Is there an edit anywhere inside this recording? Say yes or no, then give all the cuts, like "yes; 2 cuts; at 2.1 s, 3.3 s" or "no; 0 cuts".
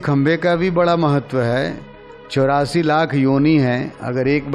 no; 0 cuts